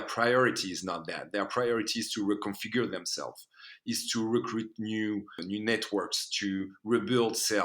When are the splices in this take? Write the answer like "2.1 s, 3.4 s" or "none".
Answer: 5.4 s